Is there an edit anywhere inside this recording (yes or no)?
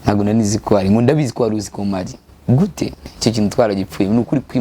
yes